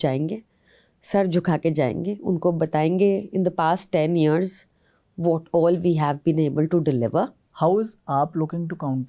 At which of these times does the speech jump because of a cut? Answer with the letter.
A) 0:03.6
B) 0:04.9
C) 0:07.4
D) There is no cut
C